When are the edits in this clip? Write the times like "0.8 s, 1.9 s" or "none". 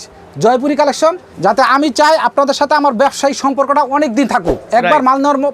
1.3 s